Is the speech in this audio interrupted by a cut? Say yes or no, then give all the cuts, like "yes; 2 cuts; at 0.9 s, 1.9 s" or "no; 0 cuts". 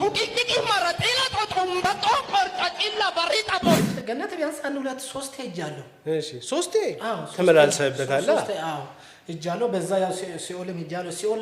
yes; 1 cut; at 3.8 s